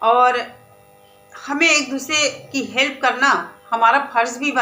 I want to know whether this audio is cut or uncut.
uncut